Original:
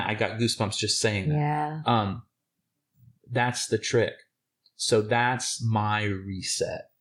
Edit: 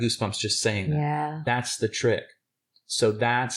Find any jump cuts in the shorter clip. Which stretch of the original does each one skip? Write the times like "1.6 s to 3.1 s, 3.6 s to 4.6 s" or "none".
1.8 s to 3.3 s